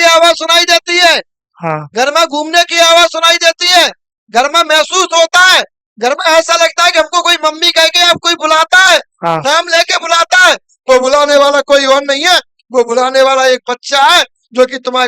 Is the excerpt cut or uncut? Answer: uncut